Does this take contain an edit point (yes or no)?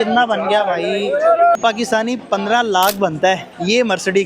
yes